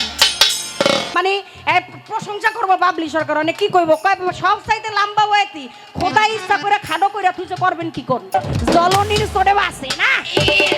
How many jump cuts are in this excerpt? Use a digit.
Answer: 2